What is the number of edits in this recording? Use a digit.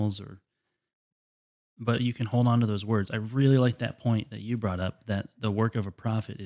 1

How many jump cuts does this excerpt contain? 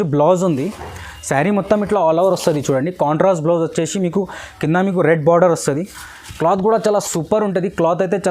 0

